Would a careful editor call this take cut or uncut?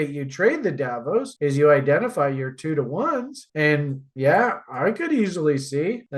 uncut